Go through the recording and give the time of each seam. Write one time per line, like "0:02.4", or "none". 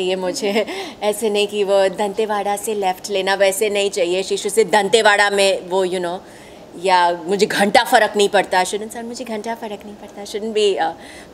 none

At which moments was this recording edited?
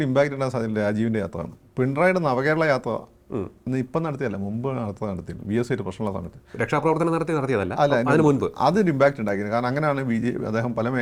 none

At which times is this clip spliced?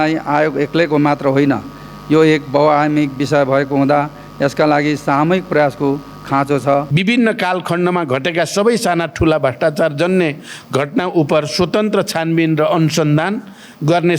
0:06.9

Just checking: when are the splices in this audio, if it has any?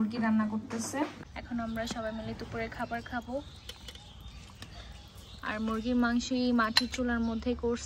0:01.3

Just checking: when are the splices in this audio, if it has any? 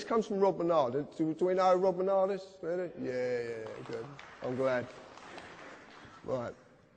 0:04.8

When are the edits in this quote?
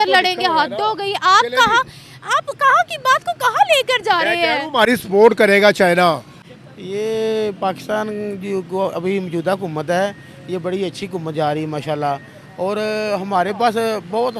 0:06.3

